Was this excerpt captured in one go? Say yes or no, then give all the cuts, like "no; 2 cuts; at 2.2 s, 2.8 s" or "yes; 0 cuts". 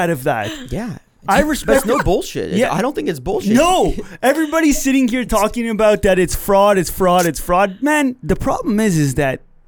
no; 1 cut; at 8.2 s